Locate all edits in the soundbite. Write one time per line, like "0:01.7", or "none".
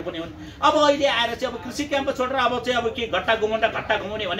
none